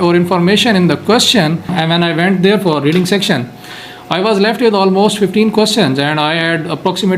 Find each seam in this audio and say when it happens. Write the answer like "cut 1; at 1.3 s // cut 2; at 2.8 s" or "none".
cut 1; at 1.7 s